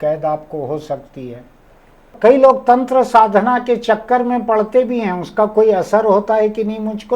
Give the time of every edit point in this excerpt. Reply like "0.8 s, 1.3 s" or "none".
2.1 s